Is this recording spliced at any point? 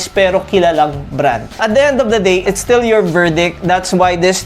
yes; 2 cuts; at 1.6 s, 2.4 s

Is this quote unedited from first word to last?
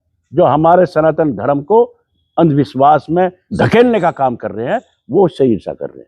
no; 1 cut; at 3.4 s

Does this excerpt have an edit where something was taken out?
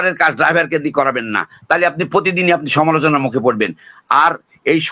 no; 0 cuts

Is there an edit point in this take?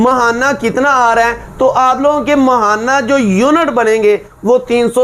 no; 0 cuts

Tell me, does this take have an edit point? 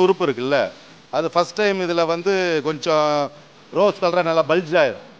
no; 0 cuts

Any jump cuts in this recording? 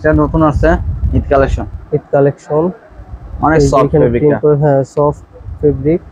no; 0 cuts

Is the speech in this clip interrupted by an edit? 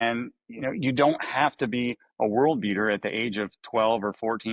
no; 0 cuts

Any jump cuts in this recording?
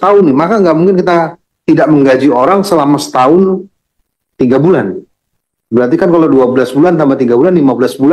no; 0 cuts

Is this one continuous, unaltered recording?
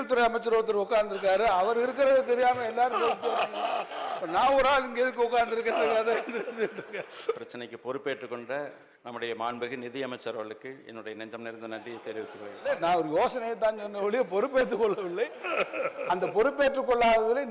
no; 2 cuts; at 7.4 s, 12.7 s

